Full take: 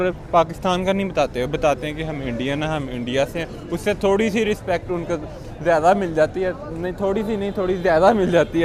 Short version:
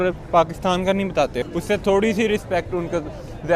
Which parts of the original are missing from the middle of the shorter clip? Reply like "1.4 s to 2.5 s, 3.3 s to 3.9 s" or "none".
1.4 s to 3.6 s